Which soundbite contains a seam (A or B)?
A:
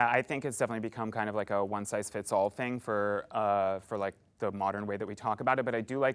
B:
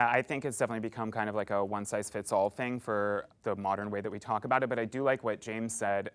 B